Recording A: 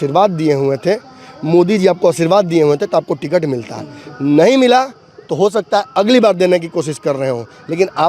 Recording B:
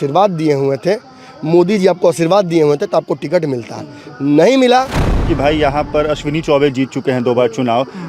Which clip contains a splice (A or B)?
B